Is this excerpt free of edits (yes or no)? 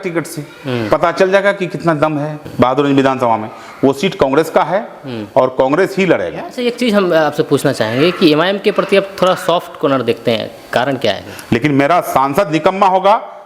no